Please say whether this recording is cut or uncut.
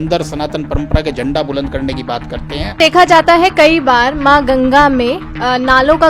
cut